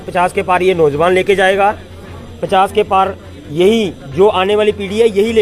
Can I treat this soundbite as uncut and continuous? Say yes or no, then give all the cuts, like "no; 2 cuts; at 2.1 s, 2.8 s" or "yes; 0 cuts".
yes; 0 cuts